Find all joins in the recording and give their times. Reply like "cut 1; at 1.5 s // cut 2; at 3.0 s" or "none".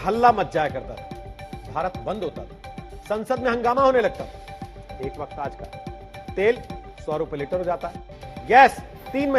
none